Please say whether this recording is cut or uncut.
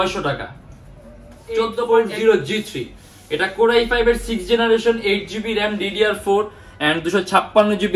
cut